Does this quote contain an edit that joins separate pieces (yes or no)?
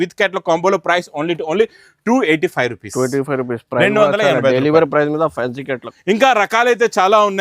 no